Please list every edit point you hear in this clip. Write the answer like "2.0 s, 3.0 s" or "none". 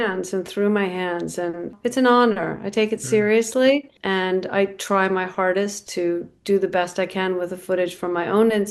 1.7 s, 3.9 s